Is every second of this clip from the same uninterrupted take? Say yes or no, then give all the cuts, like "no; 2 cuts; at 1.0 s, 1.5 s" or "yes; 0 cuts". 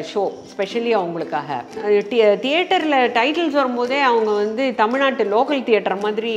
no; 1 cut; at 1.7 s